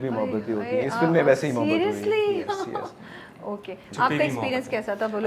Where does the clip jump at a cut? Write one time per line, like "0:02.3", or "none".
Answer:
none